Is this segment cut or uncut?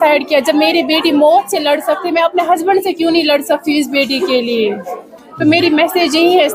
uncut